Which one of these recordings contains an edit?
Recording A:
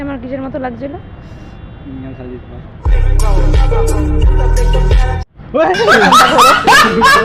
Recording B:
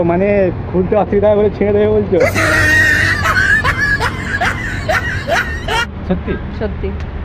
B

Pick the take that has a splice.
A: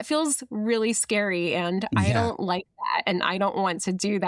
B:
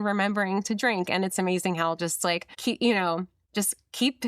B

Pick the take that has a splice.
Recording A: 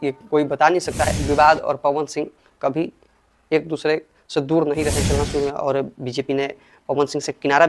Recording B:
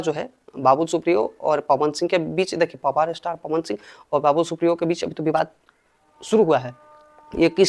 A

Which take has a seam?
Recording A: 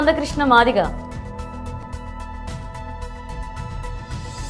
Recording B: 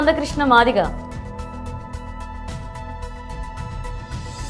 A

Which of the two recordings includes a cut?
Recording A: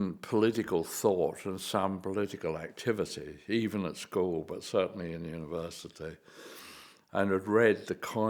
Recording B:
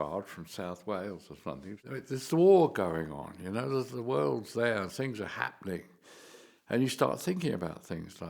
B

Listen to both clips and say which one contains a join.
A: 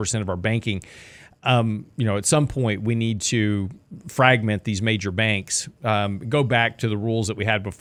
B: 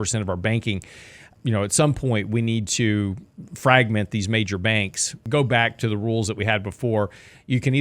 B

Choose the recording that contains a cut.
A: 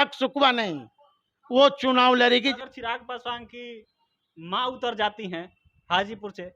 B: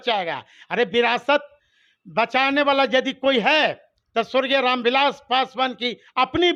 A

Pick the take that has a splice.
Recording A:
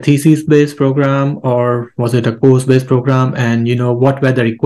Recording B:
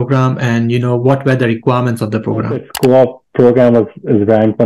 B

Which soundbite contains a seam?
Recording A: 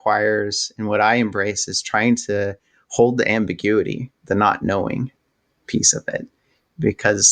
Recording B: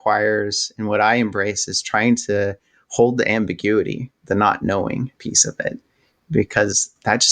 B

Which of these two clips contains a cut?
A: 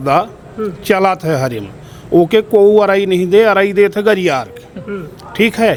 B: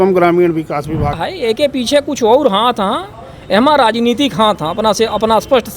B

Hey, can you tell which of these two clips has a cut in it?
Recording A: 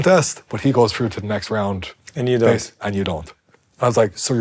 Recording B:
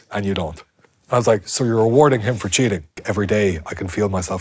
B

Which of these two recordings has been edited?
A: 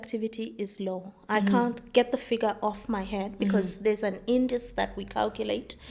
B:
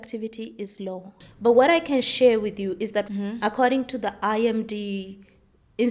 B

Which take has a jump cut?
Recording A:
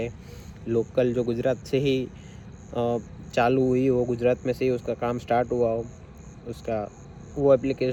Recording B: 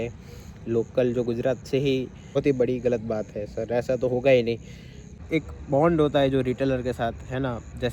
B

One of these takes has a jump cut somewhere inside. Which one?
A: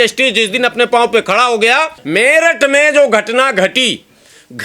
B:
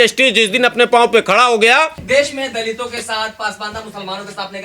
A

